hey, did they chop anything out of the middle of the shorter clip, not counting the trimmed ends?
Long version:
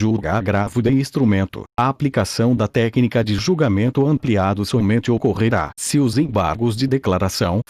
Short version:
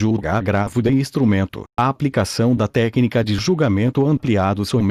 no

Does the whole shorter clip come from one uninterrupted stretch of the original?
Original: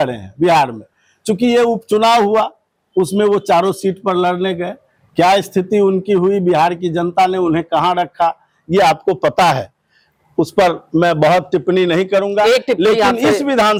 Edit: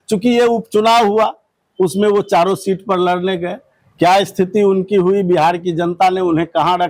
yes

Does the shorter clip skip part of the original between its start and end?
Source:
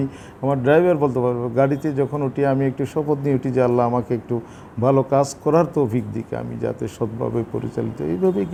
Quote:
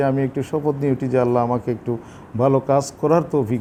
no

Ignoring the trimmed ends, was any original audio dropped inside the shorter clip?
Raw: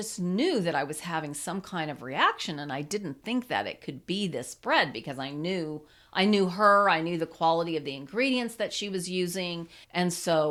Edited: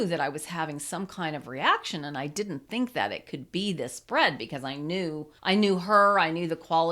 yes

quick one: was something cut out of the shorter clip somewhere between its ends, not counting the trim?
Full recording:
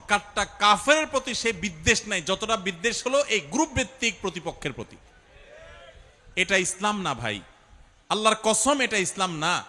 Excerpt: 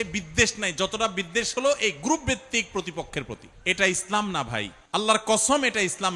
yes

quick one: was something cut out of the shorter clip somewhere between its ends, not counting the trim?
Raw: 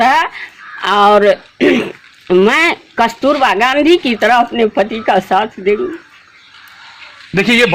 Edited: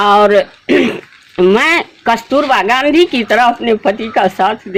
no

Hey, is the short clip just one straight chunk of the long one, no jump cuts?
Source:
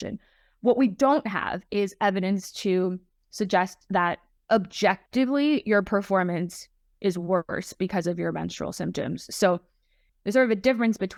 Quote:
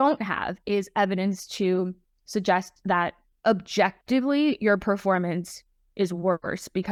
yes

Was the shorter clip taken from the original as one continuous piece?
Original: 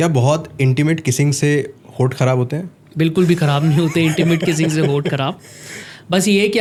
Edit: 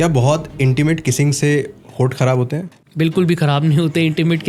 yes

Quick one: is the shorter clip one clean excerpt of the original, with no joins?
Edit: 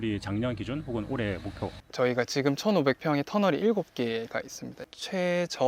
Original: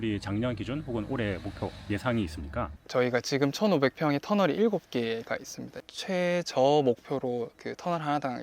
no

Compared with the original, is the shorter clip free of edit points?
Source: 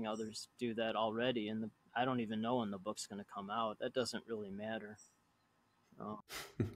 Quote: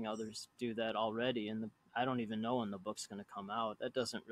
yes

